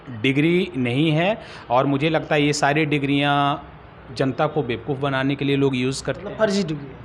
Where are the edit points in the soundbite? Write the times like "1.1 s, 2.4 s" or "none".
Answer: none